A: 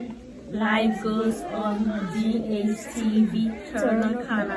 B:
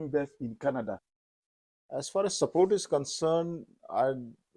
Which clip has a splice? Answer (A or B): B